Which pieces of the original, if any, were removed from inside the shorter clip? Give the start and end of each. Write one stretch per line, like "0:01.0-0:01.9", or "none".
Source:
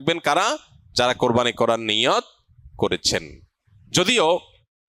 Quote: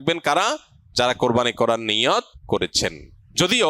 0:02.7-0:03.3

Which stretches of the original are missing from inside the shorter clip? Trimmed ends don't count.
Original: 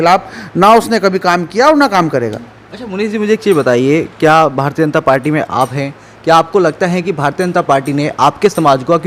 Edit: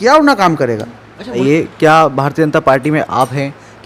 0:02.9-0:03.8

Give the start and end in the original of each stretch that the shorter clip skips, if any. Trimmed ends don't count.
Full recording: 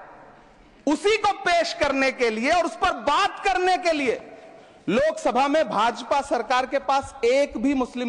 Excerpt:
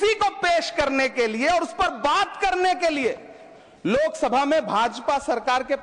none

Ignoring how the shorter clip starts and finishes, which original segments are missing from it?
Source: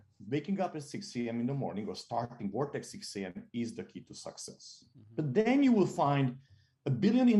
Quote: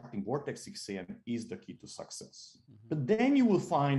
none

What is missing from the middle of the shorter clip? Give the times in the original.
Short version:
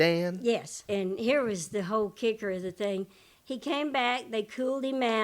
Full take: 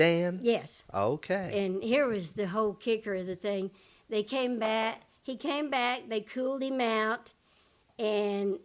0:00.8-0:01.5
0:03.9-0:05.1

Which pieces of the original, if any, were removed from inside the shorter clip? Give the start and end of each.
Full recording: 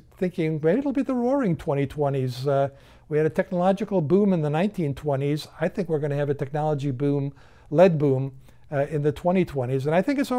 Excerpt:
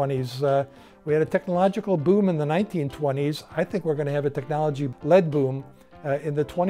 0:06.9-0:07.5

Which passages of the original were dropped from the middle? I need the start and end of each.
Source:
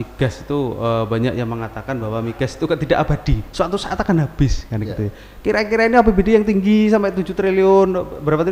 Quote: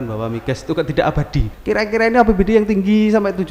0:03.4-0:05.3

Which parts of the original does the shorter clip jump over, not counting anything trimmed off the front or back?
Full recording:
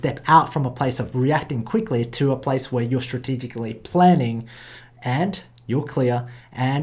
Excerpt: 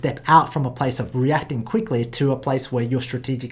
none

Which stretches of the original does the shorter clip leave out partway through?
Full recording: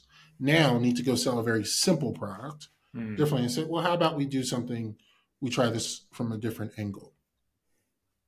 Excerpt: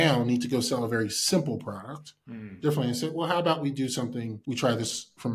0:04.9-0:05.3

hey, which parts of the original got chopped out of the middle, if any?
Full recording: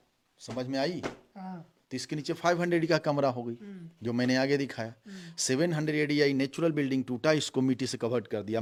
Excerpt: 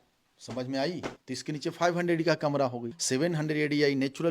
0:01.2-0:01.8
0:03.5-0:05.3

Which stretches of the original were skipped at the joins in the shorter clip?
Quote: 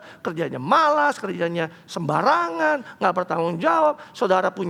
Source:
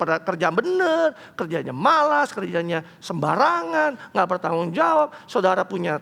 none

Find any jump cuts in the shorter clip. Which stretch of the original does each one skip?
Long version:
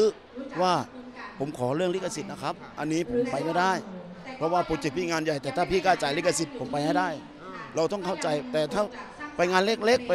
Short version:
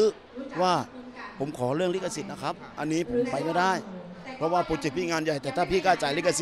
none

